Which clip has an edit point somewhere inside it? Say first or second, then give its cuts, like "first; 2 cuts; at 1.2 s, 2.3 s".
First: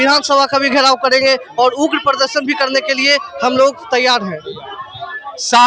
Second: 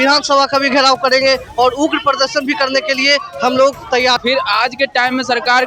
second; 1 cut; at 4.2 s